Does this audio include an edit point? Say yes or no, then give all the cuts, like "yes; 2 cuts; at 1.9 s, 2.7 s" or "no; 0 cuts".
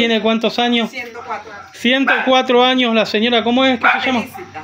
no; 0 cuts